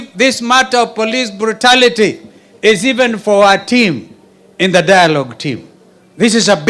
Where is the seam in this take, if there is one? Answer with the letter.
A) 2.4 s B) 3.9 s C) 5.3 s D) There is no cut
D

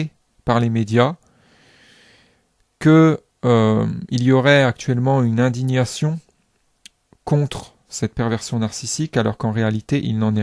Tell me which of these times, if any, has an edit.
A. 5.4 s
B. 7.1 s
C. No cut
A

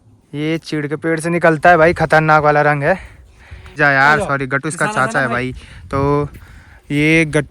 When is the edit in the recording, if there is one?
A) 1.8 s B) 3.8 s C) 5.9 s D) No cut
B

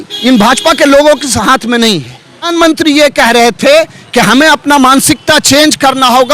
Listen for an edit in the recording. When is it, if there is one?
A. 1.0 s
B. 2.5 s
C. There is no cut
B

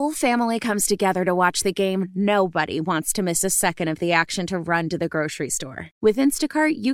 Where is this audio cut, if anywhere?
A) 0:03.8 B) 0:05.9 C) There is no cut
C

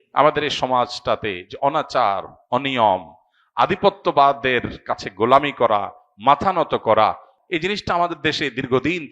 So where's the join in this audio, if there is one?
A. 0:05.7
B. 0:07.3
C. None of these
B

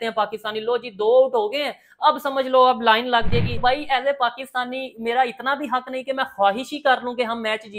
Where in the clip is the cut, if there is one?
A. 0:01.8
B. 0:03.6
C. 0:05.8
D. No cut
B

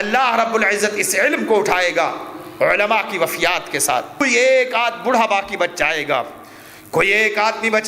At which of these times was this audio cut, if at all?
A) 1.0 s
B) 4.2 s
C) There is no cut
B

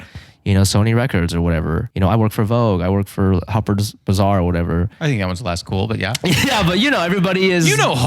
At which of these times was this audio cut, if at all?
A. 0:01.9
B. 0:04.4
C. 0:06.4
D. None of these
A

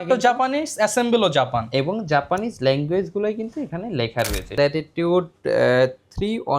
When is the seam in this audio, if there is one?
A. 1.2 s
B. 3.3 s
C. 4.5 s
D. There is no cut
C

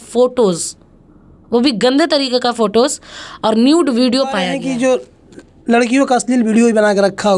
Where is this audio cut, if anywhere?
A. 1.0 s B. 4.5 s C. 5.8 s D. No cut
B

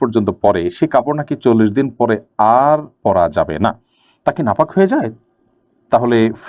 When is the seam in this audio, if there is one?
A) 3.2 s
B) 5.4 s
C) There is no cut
C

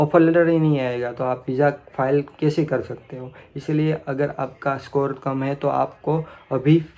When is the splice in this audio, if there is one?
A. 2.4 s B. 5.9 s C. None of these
C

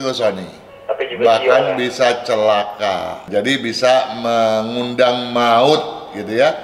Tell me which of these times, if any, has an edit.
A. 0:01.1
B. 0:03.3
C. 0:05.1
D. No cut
B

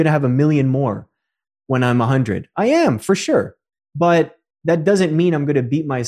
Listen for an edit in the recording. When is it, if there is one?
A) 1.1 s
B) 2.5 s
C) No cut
C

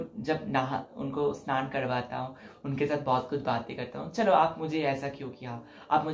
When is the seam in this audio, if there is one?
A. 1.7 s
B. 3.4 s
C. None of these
C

